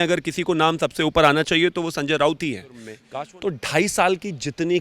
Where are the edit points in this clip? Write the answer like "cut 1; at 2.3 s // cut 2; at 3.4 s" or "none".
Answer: cut 1; at 3.0 s